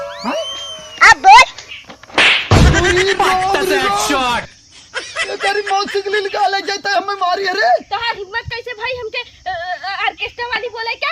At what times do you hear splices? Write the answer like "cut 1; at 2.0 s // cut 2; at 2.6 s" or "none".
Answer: none